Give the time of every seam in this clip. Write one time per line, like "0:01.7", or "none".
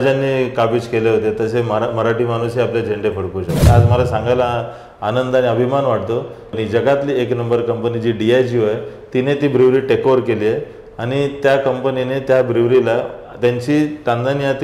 0:03.7
0:06.5

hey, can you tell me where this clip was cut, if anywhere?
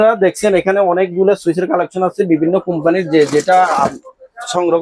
none

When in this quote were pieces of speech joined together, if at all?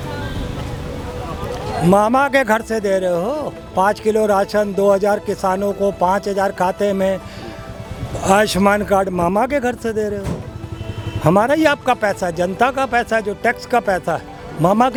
none

